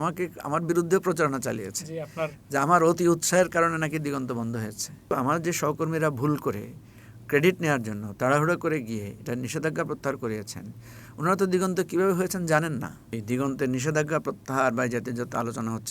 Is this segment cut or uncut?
cut